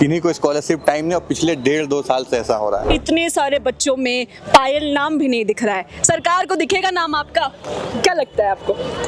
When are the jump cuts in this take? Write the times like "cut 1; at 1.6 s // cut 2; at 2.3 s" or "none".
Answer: cut 1; at 2.9 s